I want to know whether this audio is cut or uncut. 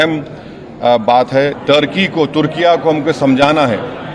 cut